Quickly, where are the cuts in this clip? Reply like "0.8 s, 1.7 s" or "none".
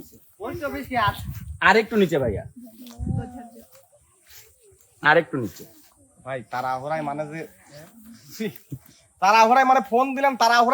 none